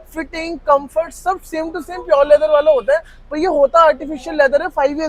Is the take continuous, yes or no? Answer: yes